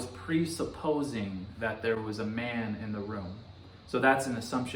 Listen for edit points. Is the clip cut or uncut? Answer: uncut